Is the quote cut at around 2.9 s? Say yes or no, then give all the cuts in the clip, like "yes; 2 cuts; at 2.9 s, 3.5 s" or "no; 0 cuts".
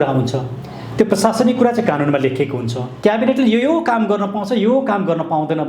yes; 1 cut; at 2.9 s